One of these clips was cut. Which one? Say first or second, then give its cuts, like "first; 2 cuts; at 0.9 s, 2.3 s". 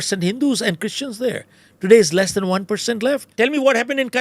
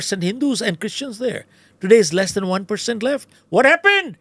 first; 1 cut; at 3.3 s